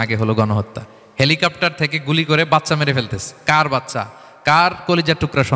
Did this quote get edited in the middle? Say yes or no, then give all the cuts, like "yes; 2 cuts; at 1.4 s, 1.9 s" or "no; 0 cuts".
no; 0 cuts